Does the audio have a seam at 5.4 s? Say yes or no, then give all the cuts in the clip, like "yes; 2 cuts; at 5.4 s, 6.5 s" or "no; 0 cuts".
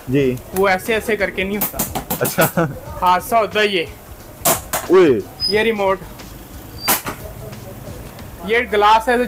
yes; 2 cuts; at 5.4 s, 8.4 s